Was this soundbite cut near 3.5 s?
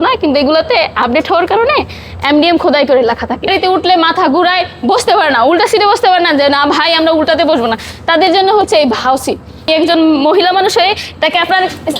yes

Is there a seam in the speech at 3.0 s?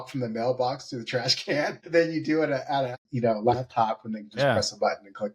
yes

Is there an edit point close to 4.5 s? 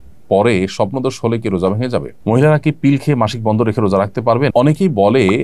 yes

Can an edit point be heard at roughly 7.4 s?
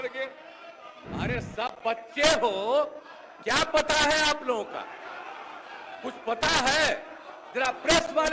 no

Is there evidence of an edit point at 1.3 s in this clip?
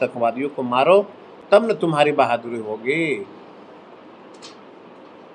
no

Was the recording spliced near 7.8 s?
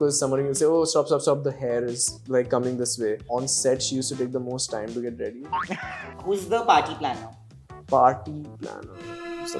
no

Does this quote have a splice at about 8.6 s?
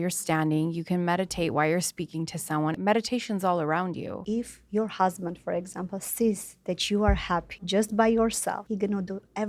yes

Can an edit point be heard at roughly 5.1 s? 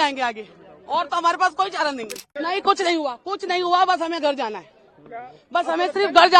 no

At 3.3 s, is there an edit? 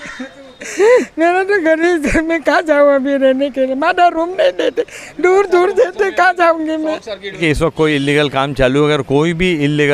no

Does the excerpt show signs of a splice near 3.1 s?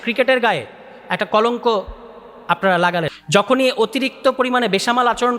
yes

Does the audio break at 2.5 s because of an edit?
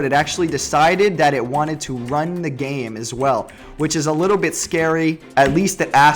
no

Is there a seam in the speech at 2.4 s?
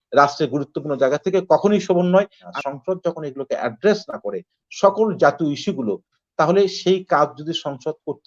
yes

